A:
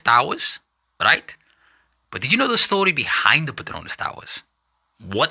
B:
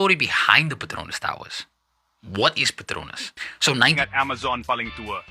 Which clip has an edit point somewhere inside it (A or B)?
B